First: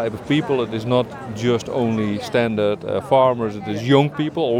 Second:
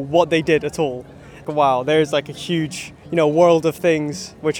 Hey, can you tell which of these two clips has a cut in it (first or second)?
second